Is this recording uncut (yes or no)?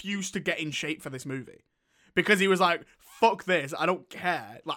yes